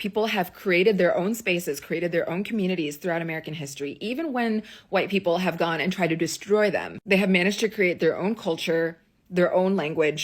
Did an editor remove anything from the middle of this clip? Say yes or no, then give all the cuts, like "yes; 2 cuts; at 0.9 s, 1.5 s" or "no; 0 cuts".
no; 0 cuts